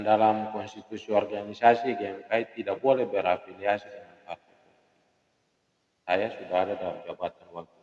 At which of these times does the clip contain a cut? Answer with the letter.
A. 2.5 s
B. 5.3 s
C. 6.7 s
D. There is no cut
D